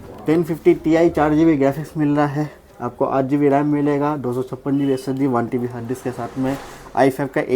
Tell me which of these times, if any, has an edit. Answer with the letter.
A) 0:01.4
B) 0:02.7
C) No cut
C